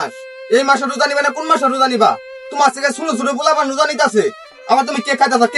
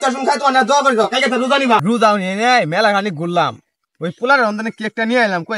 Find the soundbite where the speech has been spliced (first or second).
second